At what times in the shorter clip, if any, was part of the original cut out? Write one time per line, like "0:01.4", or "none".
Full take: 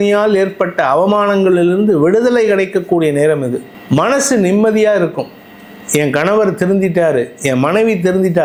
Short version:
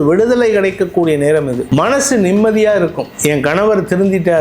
0:01.6
0:03.1